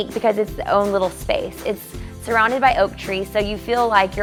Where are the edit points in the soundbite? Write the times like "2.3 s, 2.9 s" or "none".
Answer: none

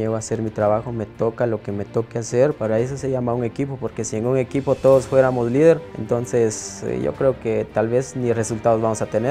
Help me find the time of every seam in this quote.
2.6 s, 5.9 s

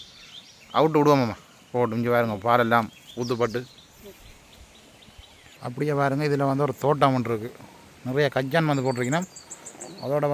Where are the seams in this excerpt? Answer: 5.5 s

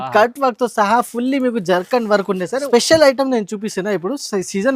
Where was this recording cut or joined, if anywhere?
2.6 s

